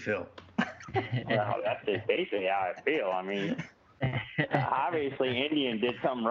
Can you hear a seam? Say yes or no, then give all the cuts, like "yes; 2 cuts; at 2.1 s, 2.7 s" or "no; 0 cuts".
no; 0 cuts